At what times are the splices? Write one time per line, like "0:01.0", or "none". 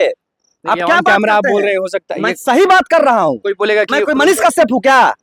none